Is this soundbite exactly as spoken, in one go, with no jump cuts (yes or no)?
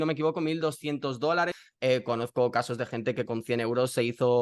no